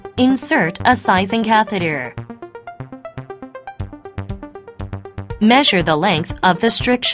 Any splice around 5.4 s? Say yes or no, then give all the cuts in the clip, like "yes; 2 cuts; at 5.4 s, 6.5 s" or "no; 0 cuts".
yes; 2 cuts; at 2.0 s, 5.4 s